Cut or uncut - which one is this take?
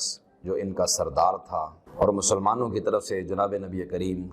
cut